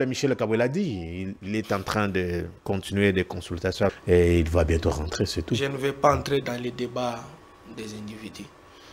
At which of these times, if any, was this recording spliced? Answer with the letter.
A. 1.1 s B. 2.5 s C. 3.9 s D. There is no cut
C